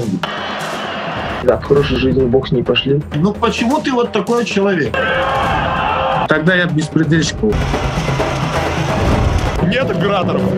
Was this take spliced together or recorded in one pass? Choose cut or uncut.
uncut